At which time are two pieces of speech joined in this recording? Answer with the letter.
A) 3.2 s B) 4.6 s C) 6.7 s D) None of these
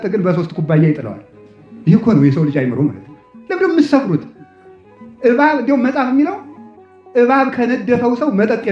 D